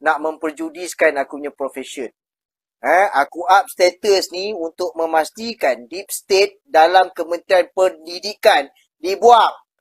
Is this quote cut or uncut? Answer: uncut